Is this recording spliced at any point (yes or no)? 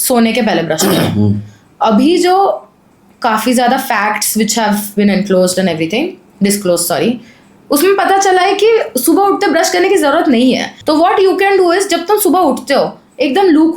yes